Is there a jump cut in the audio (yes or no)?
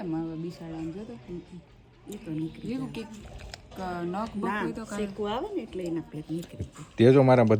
no